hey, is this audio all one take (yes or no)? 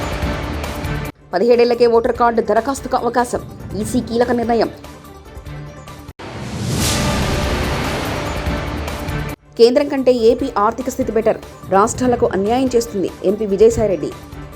no